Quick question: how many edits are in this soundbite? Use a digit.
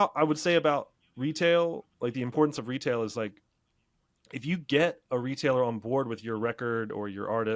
0